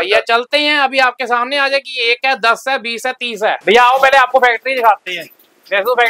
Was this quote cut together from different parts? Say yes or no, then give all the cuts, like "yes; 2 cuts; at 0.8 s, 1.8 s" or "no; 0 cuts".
yes; 1 cut; at 3.6 s